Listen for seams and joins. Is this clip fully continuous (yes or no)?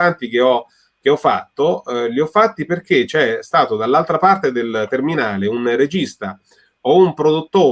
yes